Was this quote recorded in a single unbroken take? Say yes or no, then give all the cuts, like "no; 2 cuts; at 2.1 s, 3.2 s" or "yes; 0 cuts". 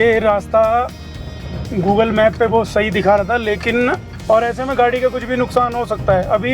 no; 1 cut; at 4.1 s